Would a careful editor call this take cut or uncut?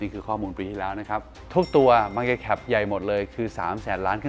cut